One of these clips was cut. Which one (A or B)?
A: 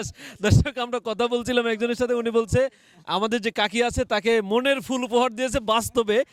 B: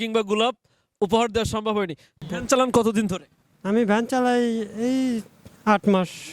B